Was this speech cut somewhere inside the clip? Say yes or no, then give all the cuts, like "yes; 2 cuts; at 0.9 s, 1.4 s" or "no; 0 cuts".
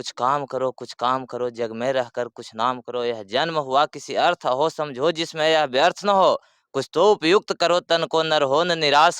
no; 0 cuts